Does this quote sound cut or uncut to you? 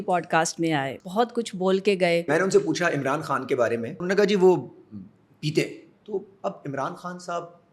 cut